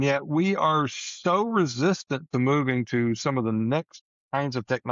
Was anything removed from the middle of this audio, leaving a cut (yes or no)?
no